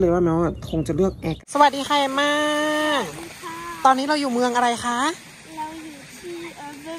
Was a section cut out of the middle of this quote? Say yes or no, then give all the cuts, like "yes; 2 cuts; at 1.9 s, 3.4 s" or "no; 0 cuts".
yes; 1 cut; at 1.3 s